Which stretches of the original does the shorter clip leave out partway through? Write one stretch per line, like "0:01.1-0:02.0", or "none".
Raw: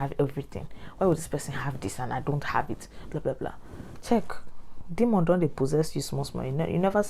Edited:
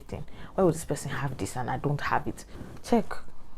0:02.9-0:03.7